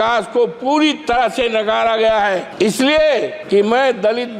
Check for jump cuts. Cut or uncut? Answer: cut